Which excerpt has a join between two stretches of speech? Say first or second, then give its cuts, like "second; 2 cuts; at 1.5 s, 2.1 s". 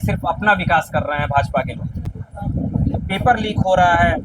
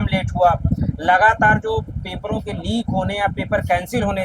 first; 1 cut; at 2.1 s